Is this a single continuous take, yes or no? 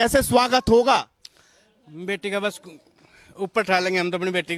yes